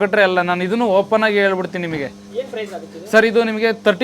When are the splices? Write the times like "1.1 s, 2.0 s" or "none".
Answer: none